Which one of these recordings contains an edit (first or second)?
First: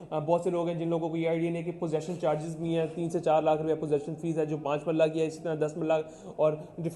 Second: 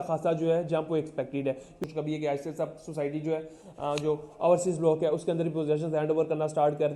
second